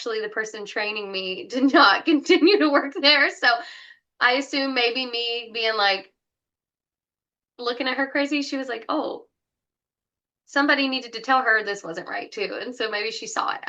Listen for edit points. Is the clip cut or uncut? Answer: uncut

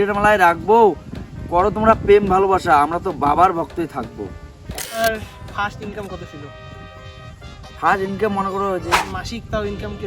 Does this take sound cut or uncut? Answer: cut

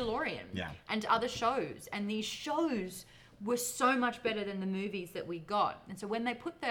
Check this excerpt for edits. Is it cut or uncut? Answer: uncut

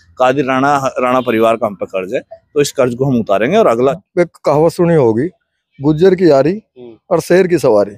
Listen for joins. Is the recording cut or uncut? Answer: cut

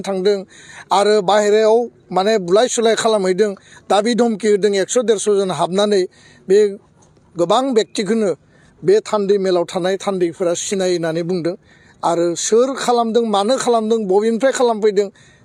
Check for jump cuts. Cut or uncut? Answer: uncut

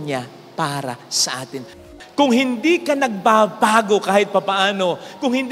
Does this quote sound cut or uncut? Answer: cut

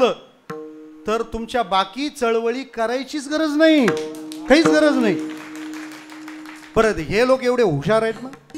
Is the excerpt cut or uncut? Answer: uncut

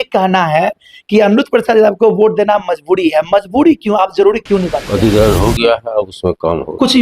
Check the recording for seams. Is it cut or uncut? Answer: cut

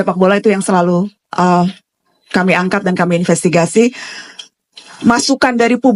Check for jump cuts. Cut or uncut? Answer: uncut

